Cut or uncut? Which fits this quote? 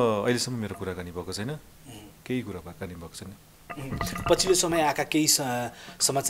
uncut